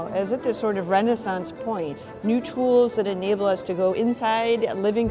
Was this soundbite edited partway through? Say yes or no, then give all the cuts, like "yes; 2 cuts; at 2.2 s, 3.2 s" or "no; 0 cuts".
yes; 1 cut; at 2.0 s